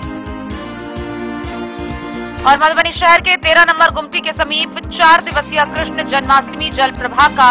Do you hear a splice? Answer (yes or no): no